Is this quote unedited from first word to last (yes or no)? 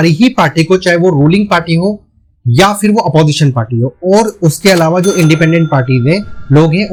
yes